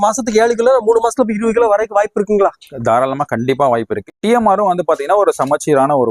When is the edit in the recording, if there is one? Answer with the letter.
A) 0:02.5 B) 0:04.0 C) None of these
B